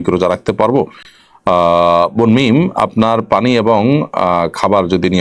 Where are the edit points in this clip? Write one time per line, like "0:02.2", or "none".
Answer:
none